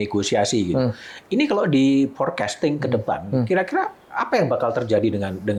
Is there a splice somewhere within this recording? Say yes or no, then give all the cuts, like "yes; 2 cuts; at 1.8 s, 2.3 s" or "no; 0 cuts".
no; 0 cuts